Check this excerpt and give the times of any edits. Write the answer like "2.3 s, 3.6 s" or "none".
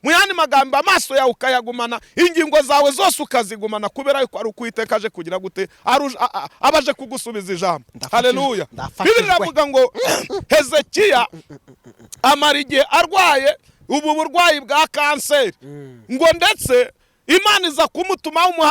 none